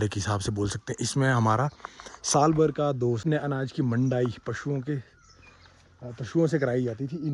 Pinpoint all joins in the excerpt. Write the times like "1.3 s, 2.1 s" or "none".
3.2 s

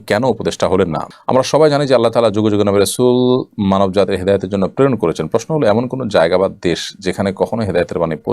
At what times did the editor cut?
1.0 s

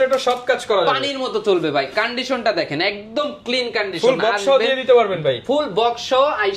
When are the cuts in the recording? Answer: none

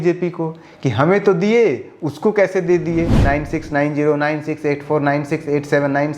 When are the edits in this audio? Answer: 3.2 s

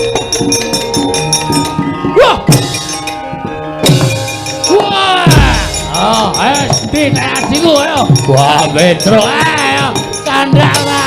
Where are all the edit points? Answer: 4.7 s

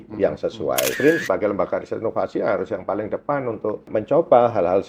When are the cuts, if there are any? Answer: 1.0 s, 3.9 s

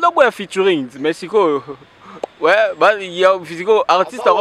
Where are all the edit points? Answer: none

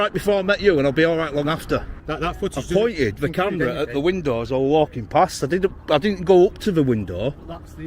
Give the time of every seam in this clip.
2.0 s

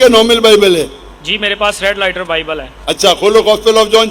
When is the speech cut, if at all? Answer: none

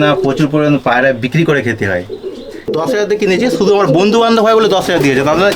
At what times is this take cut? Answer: 2.7 s

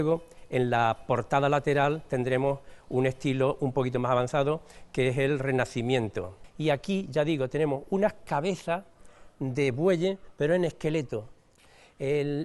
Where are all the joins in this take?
6.4 s

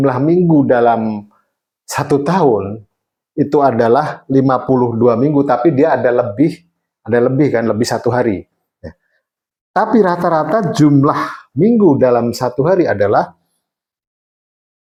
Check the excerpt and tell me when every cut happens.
none

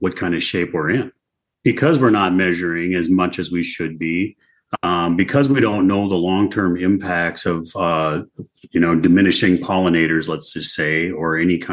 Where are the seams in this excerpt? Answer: 1.5 s

